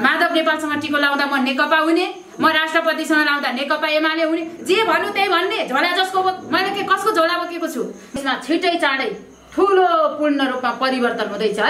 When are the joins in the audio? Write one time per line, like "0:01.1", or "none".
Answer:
0:08.2

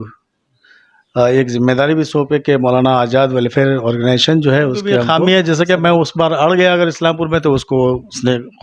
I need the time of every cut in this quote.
0:05.0

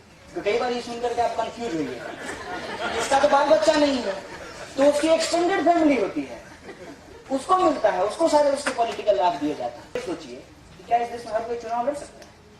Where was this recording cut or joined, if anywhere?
0:10.0

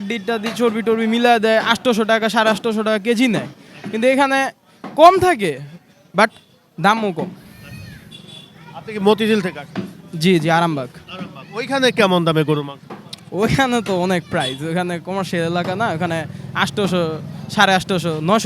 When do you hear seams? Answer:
none

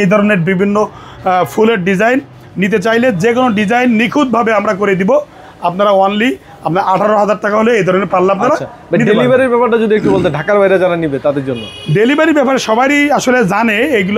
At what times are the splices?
none

